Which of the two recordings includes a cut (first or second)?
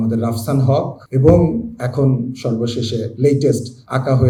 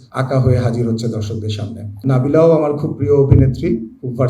second